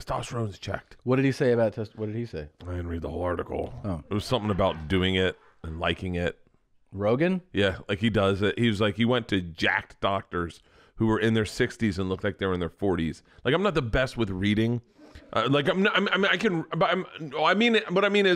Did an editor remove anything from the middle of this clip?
no; 0 cuts

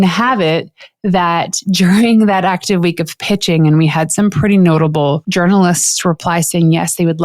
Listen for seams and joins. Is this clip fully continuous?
no; 1 cut; at 5.2 s

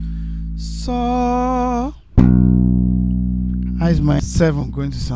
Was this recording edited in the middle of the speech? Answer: yes; 1 cut; at 4.2 s

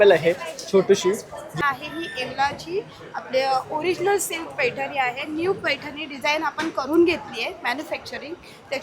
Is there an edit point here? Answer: yes; 1 cut; at 1.5 s

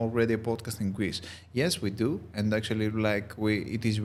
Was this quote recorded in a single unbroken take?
yes; 0 cuts

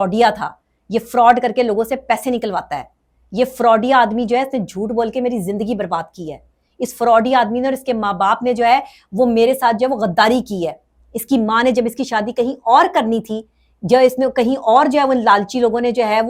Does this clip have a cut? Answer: no; 0 cuts

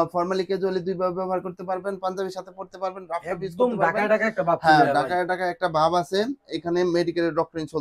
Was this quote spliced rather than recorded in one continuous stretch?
no; 0 cuts

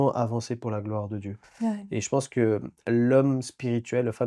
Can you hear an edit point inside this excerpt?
yes; 1 cut; at 1.4 s

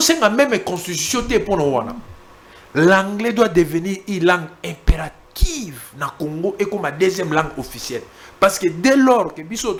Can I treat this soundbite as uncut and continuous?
yes; 0 cuts

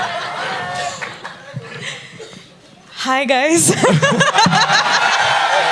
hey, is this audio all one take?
yes; 0 cuts

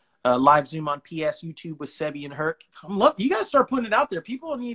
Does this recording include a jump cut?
yes; 1 cut; at 2.7 s

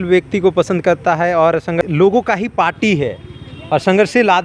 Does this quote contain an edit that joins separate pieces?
yes; 1 cut; at 1.8 s

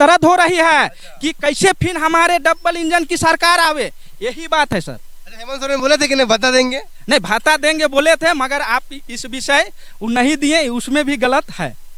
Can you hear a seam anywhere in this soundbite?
no; 0 cuts

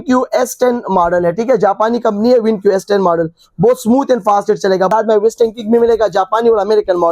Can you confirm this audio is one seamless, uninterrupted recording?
no; 1 cut; at 4.9 s

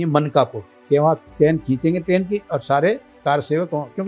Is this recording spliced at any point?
yes; 1 cut; at 1.2 s

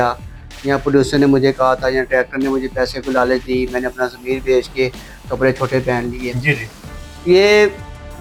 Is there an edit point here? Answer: no; 0 cuts

